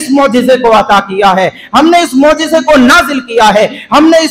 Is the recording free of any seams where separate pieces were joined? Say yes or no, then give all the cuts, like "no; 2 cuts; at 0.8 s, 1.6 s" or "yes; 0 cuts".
yes; 0 cuts